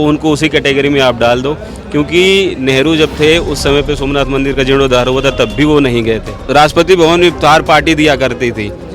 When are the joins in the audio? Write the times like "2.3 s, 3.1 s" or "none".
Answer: 6.3 s